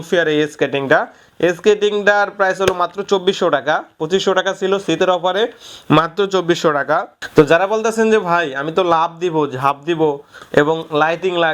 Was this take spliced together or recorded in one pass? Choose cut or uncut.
uncut